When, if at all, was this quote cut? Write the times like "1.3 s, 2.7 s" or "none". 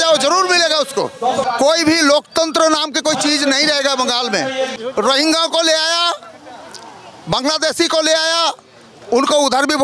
1.5 s, 4.8 s